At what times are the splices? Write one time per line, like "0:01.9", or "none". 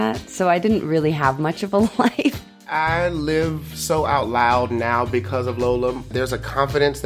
0:02.6
0:06.1